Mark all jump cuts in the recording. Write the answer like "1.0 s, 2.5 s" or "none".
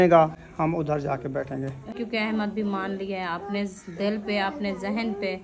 1.9 s